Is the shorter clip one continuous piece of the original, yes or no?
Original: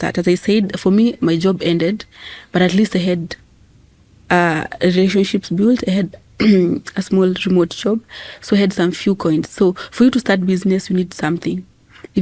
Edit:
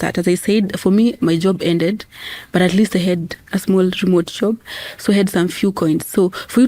no